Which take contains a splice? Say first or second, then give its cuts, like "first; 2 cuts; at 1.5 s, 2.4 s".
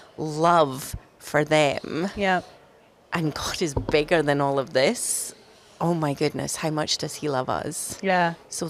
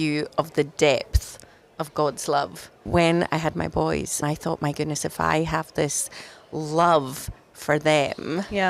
second; 2 cuts; at 2.8 s, 4.2 s